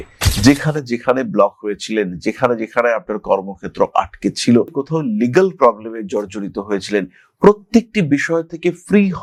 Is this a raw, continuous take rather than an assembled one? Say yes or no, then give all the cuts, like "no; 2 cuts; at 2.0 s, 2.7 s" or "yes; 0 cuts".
yes; 0 cuts